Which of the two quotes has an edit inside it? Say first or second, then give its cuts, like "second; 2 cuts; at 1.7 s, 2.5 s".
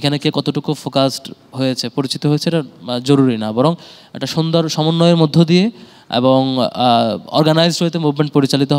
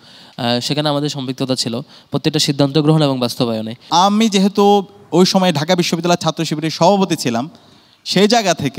second; 1 cut; at 3.9 s